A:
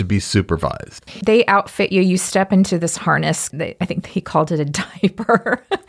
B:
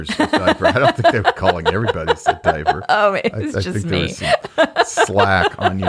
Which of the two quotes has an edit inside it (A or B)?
A